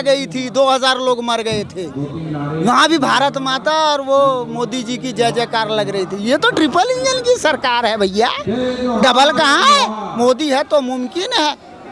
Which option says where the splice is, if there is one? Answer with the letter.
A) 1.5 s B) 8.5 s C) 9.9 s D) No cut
D